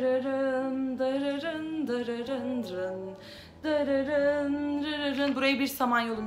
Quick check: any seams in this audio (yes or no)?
no